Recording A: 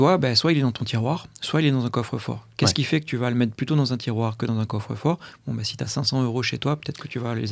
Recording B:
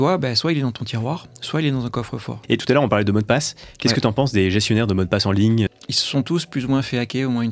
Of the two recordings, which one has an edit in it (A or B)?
B